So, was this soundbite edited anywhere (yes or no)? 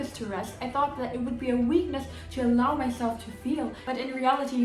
yes